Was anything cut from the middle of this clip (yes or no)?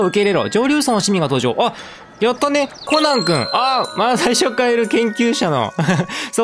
yes